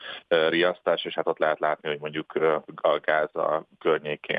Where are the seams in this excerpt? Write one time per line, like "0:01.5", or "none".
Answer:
none